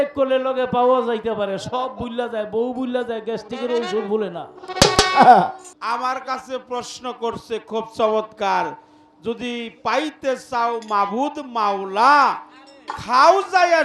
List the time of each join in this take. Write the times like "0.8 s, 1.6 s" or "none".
5.7 s